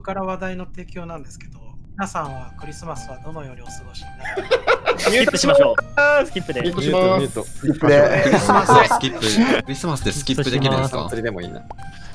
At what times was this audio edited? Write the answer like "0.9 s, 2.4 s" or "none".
1.8 s, 9.6 s